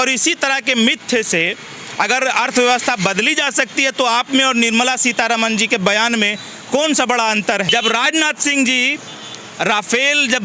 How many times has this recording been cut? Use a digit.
1